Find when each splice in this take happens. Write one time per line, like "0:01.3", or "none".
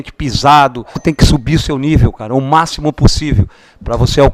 0:01.0